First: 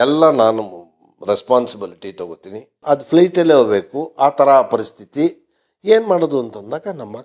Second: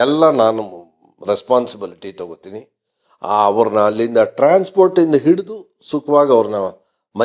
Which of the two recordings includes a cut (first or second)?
first